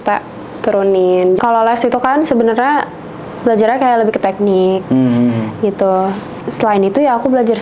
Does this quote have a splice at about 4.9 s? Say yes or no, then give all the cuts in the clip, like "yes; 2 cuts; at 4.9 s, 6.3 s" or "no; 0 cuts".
no; 2 cuts; at 1.4 s, 6.4 s